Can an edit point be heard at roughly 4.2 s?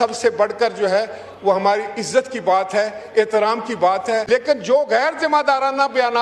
yes; 1 cut; at 4.2 s

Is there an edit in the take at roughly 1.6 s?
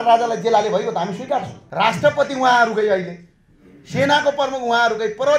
yes; 1 cut; at 1.6 s

